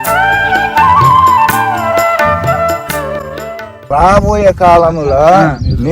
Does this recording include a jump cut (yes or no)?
yes